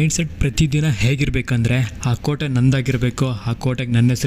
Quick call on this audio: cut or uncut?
uncut